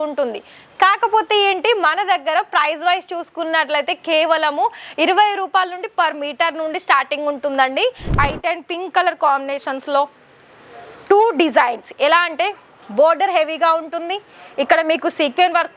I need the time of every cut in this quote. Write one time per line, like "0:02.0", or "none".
0:08.2